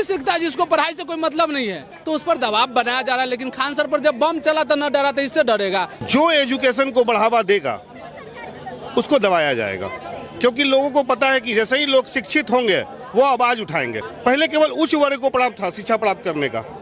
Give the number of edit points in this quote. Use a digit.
3